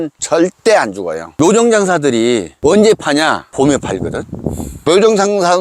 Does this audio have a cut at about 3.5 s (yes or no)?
no